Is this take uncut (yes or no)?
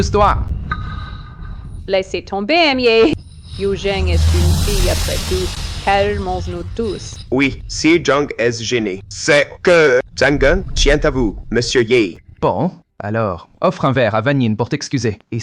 yes